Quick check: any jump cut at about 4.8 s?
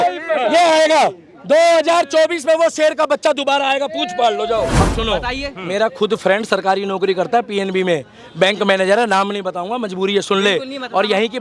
yes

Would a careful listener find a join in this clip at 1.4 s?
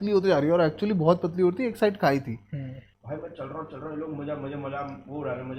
no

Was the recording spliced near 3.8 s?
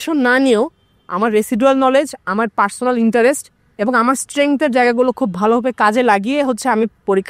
no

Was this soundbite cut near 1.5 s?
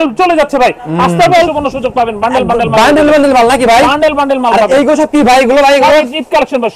yes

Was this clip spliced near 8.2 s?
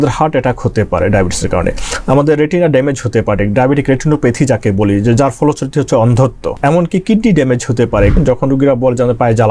yes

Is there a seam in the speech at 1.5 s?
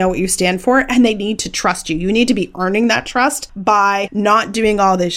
no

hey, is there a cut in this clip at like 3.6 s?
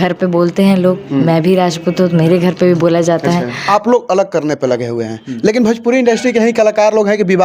yes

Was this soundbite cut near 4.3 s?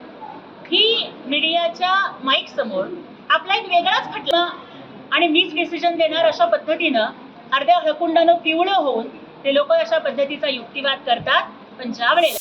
yes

